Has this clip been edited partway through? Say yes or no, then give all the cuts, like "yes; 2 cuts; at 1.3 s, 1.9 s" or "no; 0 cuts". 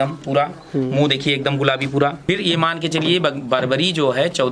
yes; 1 cut; at 2.2 s